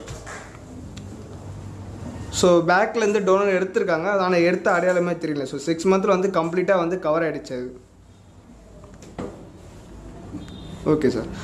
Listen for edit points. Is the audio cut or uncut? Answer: uncut